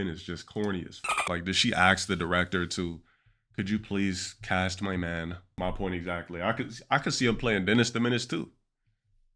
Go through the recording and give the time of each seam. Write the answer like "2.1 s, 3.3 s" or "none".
5.4 s

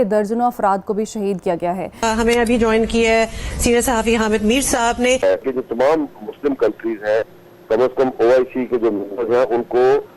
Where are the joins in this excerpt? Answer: 2.0 s, 5.2 s

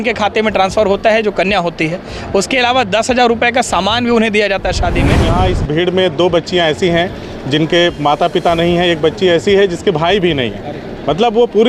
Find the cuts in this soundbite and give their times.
5.3 s

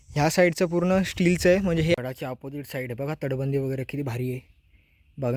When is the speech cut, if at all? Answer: 1.9 s

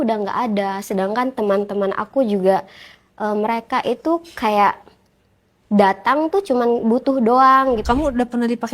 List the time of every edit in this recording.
7.8 s

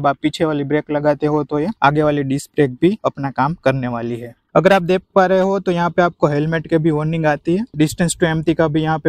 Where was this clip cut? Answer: 4.3 s, 7.7 s

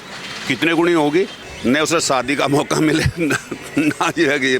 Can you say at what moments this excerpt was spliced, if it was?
1.4 s

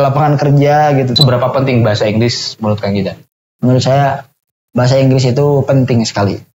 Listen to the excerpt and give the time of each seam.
1.1 s

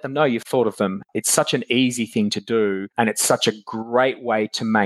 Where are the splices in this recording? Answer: 1.0 s

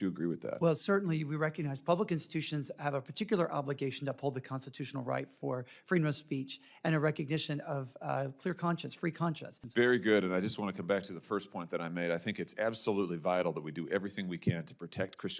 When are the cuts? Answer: 9.5 s

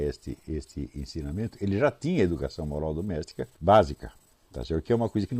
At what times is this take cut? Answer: 3.4 s

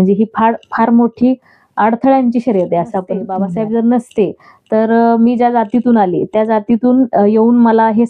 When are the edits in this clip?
3.3 s

